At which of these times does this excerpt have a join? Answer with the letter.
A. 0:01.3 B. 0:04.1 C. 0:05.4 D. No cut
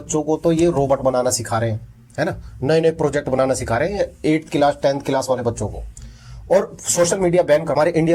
D